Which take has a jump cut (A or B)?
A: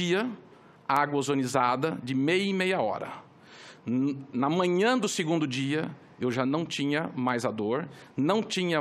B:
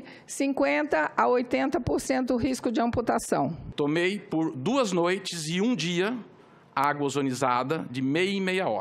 B